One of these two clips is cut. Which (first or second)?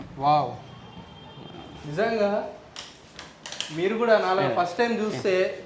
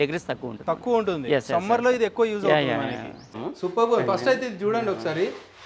second